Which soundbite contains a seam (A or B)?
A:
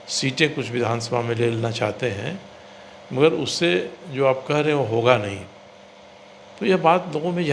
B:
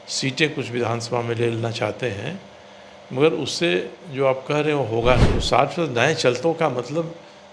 B